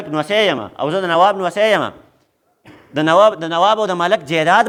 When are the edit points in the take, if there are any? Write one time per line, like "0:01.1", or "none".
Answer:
none